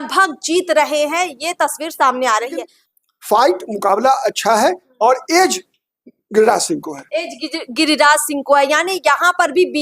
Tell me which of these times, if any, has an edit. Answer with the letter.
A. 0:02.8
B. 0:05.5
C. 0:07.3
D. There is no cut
A